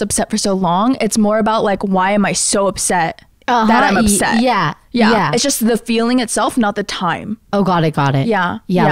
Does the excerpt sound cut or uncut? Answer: uncut